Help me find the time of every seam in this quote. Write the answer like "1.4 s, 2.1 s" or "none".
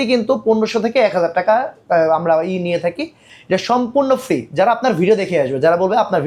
none